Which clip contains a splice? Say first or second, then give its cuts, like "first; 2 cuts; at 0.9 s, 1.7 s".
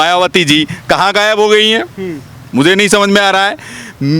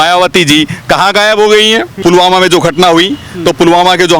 second; 1 cut; at 2.0 s